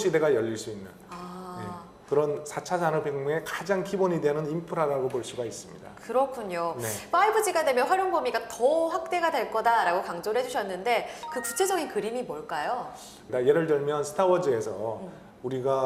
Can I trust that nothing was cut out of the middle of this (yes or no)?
yes